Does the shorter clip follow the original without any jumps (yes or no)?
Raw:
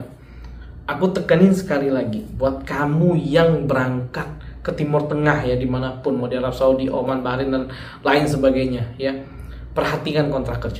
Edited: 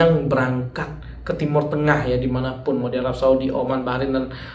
yes